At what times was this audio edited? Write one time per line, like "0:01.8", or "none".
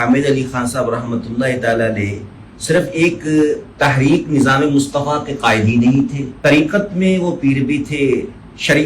0:06.2